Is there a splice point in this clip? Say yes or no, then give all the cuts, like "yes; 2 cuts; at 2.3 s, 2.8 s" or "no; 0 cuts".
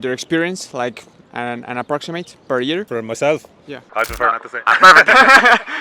no; 0 cuts